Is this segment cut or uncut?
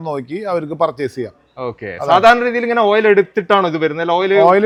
uncut